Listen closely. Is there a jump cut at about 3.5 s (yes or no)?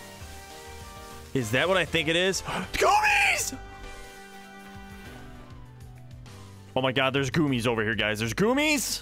no